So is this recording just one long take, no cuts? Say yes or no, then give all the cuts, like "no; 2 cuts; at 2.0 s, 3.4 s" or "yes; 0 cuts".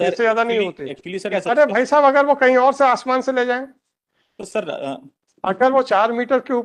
no; 1 cut; at 1.3 s